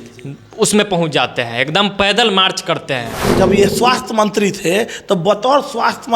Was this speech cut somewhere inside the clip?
yes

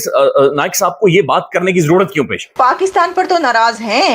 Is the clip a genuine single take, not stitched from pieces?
no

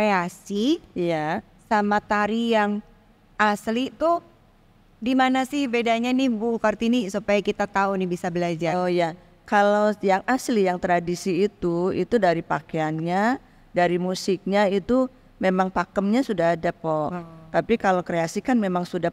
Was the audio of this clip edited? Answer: no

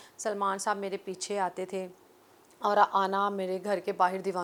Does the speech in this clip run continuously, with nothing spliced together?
yes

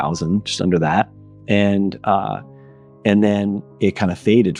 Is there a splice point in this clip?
no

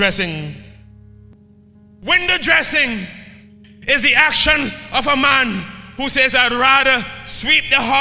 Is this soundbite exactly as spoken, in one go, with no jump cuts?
no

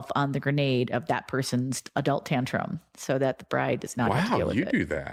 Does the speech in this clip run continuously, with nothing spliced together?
yes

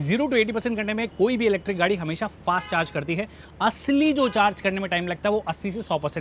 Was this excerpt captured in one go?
yes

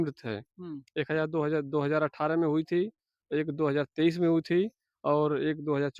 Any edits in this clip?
no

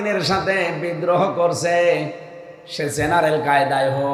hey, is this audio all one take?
yes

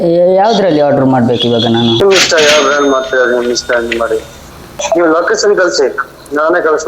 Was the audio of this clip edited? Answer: yes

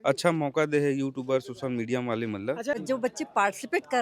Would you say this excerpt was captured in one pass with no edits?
no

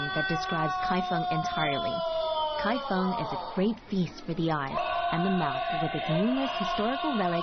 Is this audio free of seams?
no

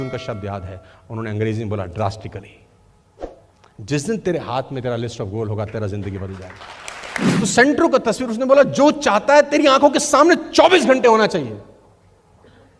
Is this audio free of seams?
no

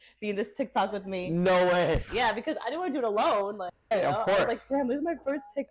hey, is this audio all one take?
yes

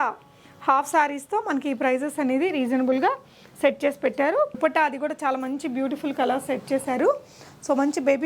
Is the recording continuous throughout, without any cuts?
no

